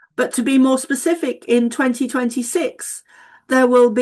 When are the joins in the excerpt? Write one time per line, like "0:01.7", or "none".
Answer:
none